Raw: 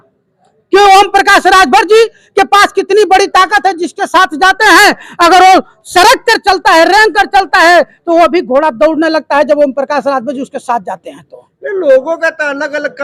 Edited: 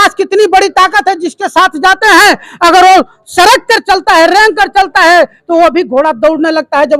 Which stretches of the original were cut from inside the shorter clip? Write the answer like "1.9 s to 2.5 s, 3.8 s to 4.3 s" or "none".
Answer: none